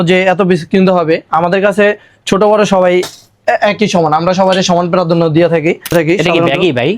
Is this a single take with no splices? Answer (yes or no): no